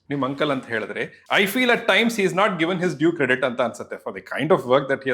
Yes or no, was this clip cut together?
yes